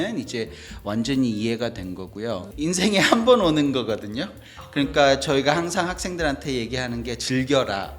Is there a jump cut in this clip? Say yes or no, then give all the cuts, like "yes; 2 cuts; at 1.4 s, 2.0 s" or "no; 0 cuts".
yes; 1 cut; at 2.5 s